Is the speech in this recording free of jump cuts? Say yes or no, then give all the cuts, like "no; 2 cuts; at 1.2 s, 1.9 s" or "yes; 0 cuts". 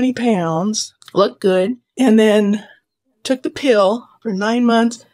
no; 2 cuts; at 0.9 s, 1.8 s